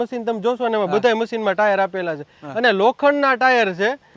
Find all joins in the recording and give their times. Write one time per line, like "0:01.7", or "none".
none